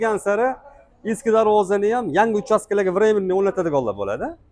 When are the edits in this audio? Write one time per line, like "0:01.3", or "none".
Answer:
none